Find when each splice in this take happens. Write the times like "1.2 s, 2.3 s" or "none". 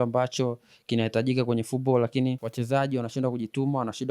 2.5 s